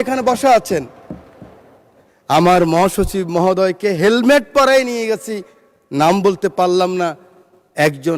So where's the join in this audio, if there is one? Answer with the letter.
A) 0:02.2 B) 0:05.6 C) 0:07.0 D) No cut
D